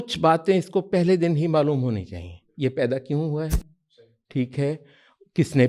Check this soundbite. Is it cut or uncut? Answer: uncut